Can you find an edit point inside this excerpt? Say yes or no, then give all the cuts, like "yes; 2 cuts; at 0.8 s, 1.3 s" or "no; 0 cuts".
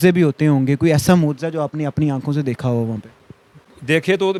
no; 0 cuts